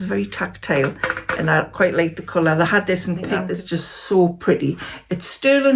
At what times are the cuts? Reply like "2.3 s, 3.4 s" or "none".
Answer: 3.4 s